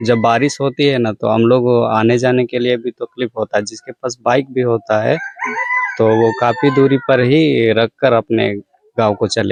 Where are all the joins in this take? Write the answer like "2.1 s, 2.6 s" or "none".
none